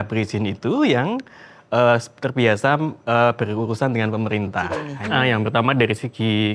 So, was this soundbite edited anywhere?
yes; 1 cut; at 4.9 s

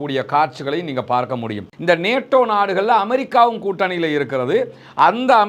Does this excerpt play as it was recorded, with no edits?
no; 1 cut; at 1.7 s

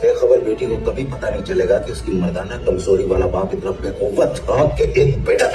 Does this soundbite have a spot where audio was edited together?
no; 0 cuts

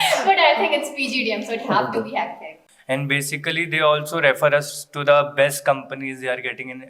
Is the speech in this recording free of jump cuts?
no; 1 cut; at 2.5 s

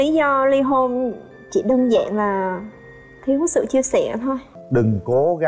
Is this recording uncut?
no; 1 cut; at 4.5 s

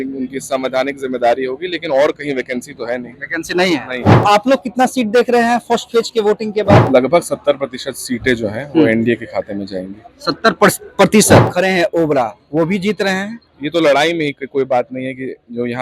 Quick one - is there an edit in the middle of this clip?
yes; 3 cuts; at 4.2 s, 6.8 s, 11.5 s

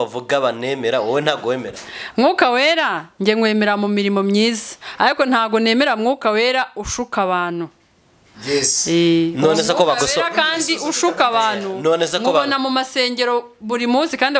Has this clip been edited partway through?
no; 0 cuts

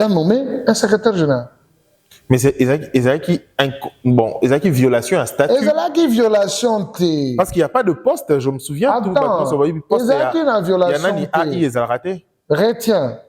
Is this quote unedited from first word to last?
yes; 0 cuts

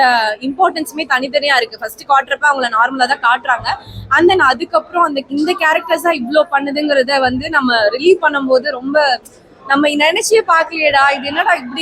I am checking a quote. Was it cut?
no; 0 cuts

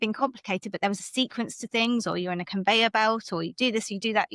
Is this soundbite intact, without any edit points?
yes; 0 cuts

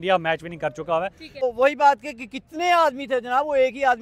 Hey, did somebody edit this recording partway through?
yes; 1 cut; at 1.4 s

